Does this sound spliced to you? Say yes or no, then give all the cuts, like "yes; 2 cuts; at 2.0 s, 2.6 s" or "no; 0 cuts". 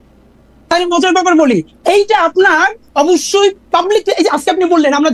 no; 0 cuts